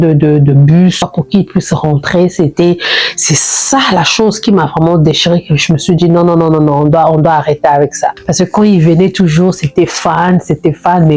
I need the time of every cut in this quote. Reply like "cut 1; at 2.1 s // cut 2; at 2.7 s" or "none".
cut 1; at 1.1 s // cut 2; at 8.2 s